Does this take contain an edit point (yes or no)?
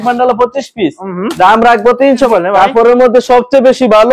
yes